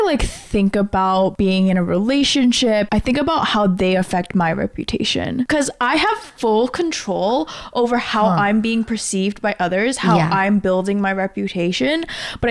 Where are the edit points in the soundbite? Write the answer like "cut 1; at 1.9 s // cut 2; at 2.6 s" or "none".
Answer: cut 1; at 1.3 s // cut 2; at 2.9 s // cut 3; at 5.5 s